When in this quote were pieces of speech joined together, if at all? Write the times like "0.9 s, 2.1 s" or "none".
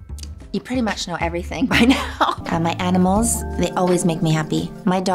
2.4 s